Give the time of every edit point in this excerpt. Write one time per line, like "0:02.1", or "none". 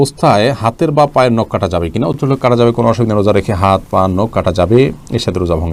none